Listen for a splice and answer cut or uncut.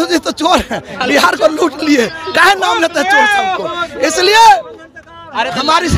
uncut